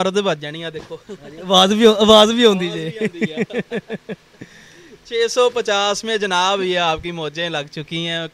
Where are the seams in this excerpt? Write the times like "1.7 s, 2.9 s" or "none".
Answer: none

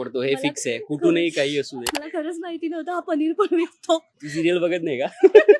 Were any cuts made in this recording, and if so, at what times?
1.8 s, 4.2 s

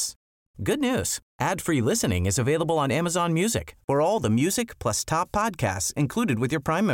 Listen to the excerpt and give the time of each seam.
none

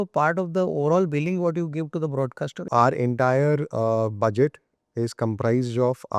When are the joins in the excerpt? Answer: 2.7 s

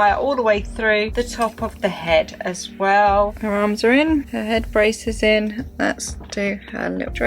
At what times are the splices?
3.4 s

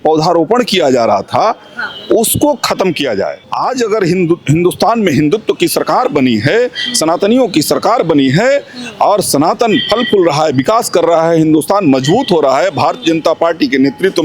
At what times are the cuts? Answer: 3.5 s

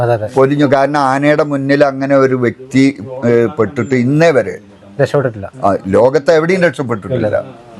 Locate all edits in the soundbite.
none

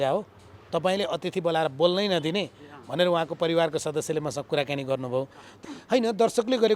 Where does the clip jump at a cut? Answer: 5.6 s

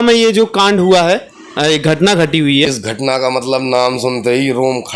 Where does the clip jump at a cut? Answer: 2.7 s

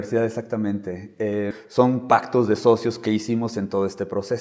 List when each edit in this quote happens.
1.6 s

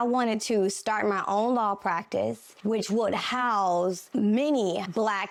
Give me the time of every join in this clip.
none

